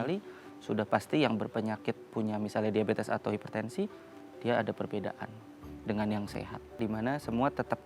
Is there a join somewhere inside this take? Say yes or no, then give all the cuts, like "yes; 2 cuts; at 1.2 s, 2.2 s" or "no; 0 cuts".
yes; 1 cut; at 6.8 s